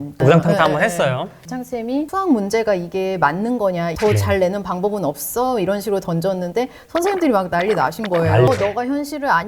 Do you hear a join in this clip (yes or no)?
yes